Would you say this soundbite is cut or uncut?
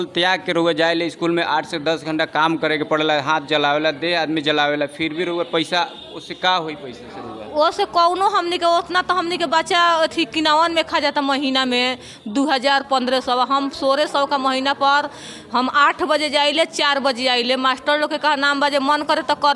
uncut